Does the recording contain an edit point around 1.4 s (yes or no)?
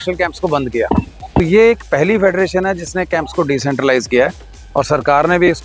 yes